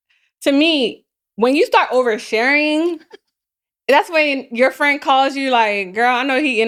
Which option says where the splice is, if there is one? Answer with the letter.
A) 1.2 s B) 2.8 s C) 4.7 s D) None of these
D